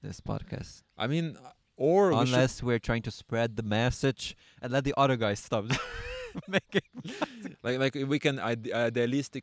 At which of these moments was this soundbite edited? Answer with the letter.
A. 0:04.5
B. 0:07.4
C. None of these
B